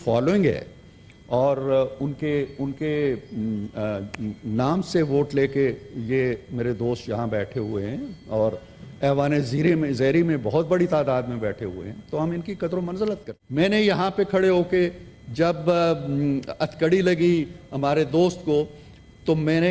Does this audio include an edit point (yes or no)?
yes